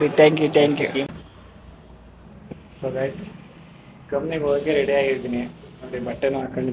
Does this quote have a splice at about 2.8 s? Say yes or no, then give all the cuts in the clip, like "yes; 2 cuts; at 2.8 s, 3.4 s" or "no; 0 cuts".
no; 1 cut; at 1.1 s